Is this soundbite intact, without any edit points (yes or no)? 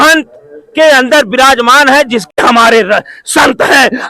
no